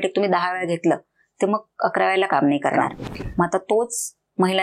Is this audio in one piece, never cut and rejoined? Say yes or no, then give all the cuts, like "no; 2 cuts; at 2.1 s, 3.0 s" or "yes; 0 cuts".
no; 1 cut; at 3.0 s